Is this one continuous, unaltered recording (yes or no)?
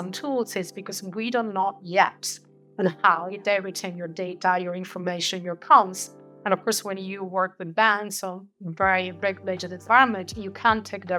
yes